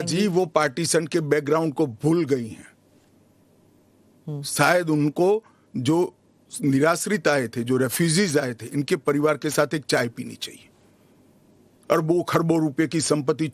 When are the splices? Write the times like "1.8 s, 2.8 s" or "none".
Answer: none